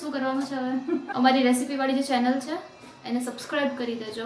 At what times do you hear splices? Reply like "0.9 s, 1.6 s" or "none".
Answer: 1.1 s